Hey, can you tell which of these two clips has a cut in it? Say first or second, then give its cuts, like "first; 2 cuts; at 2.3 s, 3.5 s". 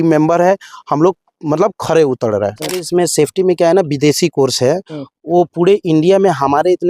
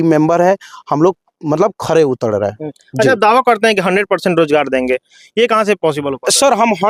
first; 1 cut; at 2.9 s